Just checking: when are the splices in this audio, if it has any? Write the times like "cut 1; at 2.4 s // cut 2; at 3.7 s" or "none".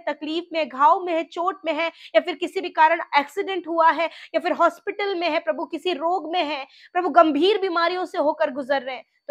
none

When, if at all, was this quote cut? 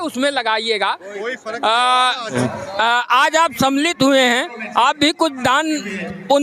cut 1; at 2.3 s

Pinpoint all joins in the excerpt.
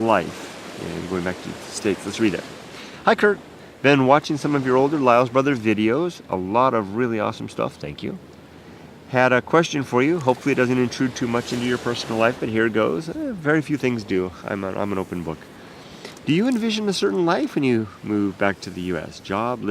cut 1; at 13.4 s

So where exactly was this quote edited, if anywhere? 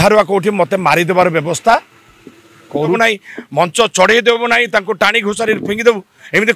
cut 1; at 3.0 s

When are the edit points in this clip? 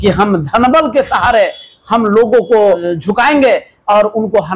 cut 1; at 2.9 s

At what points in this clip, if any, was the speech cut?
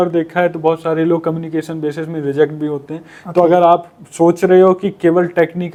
none

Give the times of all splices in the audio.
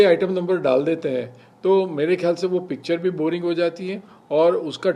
none

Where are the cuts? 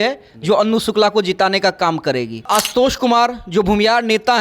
cut 1; at 2.5 s

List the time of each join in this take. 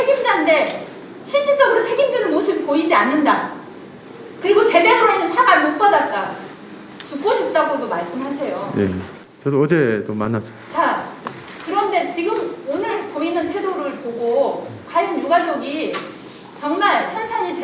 none

